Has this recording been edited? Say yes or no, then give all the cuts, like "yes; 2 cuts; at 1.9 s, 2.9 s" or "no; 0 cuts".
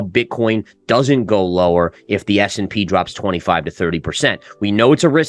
no; 0 cuts